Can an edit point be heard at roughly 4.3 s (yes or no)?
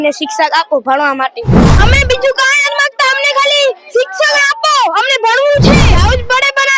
no